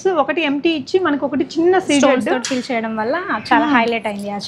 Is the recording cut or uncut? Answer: uncut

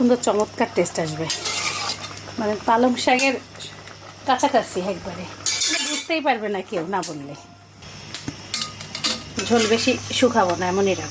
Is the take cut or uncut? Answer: uncut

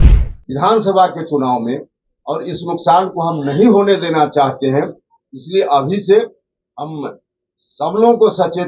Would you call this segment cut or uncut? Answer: uncut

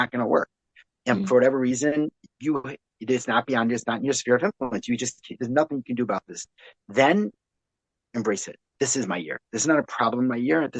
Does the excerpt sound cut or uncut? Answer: uncut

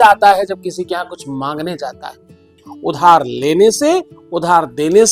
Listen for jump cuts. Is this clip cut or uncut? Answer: cut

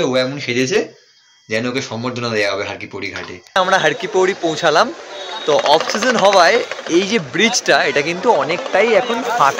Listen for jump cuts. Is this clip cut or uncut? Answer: cut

